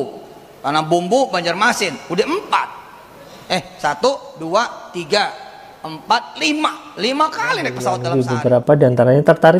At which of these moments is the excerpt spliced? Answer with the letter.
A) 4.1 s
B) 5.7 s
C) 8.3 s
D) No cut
C